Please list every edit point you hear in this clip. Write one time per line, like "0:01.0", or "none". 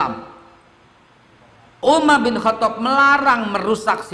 0:01.8